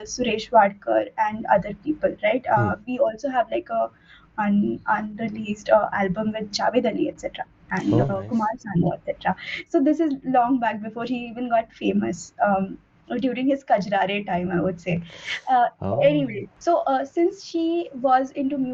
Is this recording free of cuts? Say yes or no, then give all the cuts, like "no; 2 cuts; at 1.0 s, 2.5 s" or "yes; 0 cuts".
yes; 0 cuts